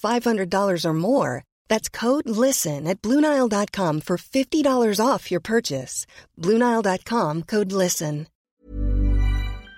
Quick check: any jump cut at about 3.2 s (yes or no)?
no